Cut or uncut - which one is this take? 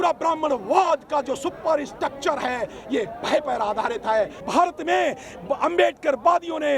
cut